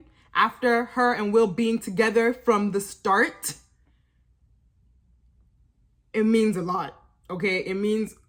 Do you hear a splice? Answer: no; 0 cuts

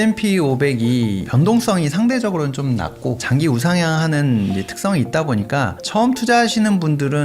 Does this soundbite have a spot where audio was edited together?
yes; 2 cuts; at 1.2 s, 3.2 s

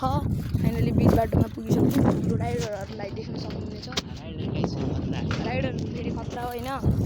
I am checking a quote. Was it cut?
no; 0 cuts

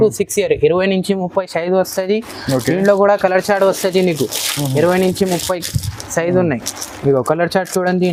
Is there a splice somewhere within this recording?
no; 0 cuts

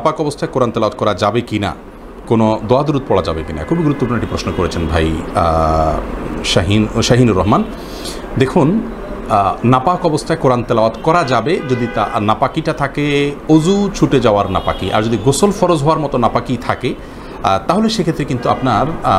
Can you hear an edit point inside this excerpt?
no; 0 cuts

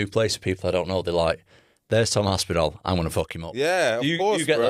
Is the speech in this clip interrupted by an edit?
no; 0 cuts

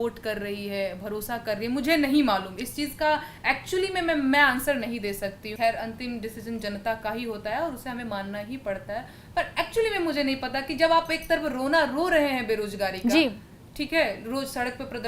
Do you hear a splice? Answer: yes; 1 cut; at 5.5 s

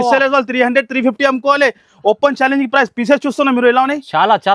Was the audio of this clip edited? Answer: no; 0 cuts

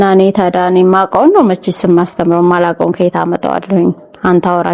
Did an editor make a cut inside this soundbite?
no; 0 cuts

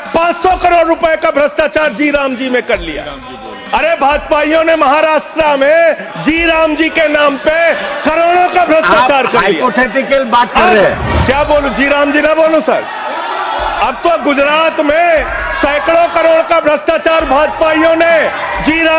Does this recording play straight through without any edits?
no; 1 cut; at 11.1 s

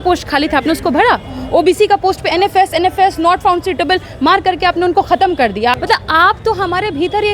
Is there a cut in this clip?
yes; 1 cut; at 5.7 s

